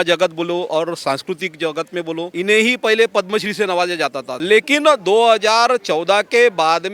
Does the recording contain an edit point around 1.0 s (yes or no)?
no